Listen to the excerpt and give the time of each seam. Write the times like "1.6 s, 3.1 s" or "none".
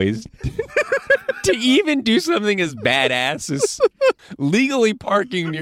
4.2 s